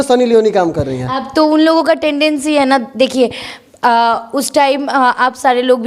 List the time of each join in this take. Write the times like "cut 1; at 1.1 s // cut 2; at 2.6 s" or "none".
none